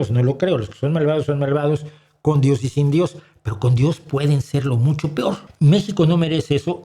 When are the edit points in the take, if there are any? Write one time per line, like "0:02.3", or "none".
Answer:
0:05.5